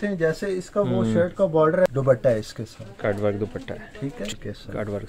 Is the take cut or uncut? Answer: cut